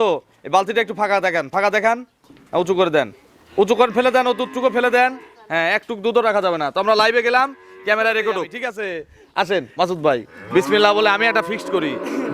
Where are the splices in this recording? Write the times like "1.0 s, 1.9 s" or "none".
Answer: 8.6 s